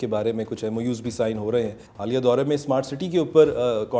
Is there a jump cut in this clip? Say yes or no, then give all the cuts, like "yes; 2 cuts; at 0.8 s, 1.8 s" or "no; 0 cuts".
yes; 1 cut; at 1.8 s